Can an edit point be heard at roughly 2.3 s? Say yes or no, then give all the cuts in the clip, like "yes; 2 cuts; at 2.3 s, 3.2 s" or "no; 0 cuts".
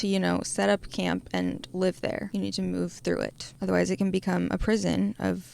yes; 2 cuts; at 2.3 s, 3.5 s